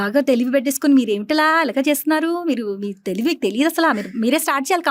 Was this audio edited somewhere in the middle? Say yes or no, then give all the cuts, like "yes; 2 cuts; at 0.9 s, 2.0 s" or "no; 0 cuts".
no; 0 cuts